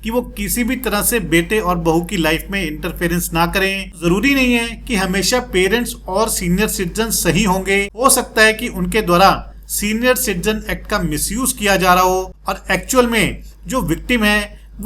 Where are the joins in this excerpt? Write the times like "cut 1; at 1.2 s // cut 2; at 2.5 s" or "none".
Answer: cut 1; at 4.0 s // cut 2; at 12.4 s

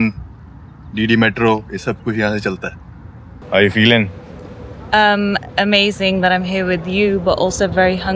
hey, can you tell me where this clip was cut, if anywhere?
cut 1; at 3.4 s

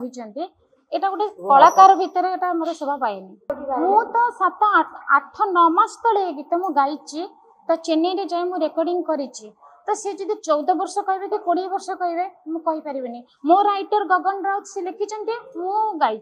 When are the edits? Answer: cut 1; at 3.5 s

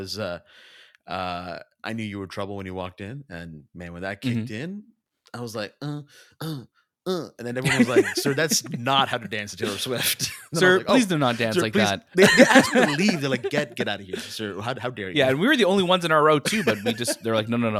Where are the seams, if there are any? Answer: none

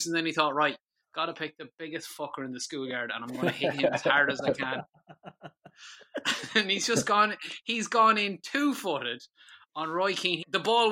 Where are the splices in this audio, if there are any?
none

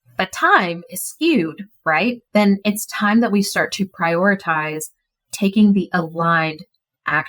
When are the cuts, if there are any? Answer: cut 1; at 2.2 s

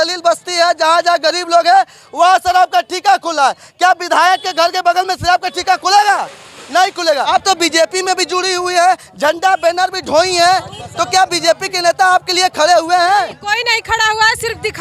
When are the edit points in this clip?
cut 1; at 7.3 s

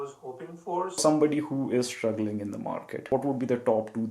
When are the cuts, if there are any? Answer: cut 1; at 1.0 s // cut 2; at 3.0 s

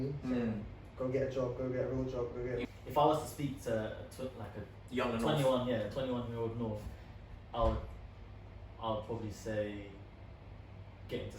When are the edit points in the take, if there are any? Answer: cut 1; at 2.6 s

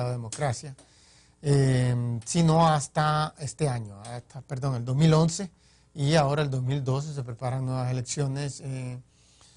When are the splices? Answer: cut 1; at 2.2 s

